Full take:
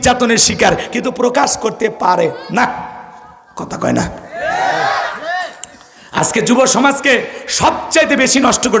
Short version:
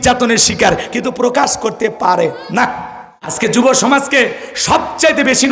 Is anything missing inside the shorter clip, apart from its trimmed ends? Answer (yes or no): yes